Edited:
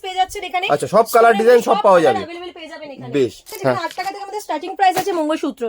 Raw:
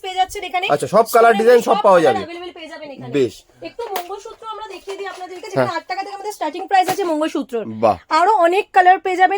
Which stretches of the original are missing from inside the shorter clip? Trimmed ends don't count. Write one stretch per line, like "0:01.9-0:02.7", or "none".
0:03.5-0:05.4